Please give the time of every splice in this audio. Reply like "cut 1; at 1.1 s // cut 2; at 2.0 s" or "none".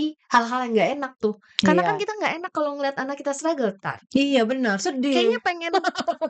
none